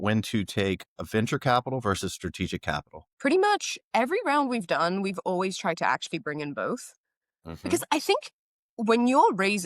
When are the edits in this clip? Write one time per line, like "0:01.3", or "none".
0:03.1